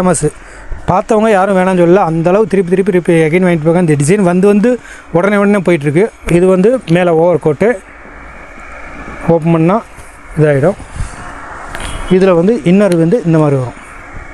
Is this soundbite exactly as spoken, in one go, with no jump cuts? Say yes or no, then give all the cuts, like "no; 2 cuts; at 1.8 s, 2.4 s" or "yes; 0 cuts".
no; 1 cut; at 6.2 s